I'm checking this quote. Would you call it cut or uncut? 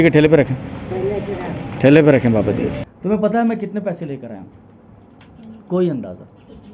cut